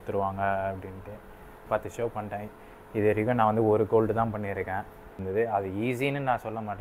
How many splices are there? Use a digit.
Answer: 2